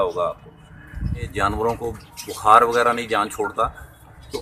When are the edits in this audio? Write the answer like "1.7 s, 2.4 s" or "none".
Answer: 1.3 s